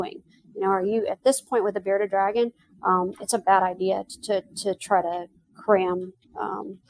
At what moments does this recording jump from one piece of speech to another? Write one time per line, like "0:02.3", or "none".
none